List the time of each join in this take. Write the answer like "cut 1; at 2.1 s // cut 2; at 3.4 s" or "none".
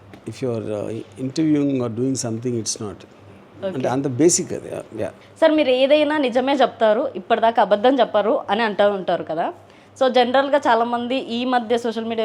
cut 1; at 5.1 s